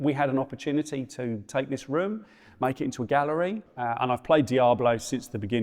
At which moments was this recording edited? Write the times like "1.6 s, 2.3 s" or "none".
3.6 s